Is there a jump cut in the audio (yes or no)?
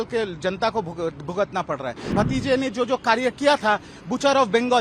yes